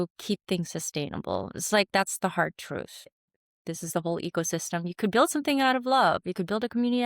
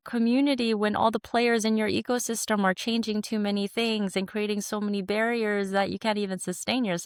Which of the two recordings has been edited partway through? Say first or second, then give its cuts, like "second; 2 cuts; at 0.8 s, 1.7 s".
first; 1 cut; at 3.2 s